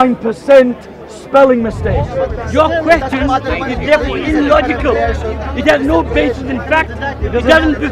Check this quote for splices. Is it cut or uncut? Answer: cut